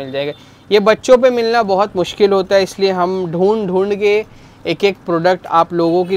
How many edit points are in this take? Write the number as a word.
zero